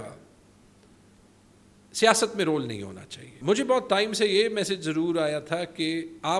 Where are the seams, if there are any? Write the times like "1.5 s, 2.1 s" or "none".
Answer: 3.3 s